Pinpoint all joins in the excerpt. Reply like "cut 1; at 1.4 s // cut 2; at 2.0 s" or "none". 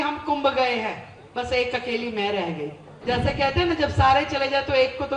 cut 1; at 2.9 s